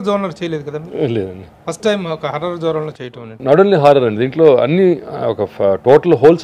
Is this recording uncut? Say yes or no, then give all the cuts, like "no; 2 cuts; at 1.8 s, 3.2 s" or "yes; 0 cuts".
no; 2 cuts; at 1.5 s, 2.9 s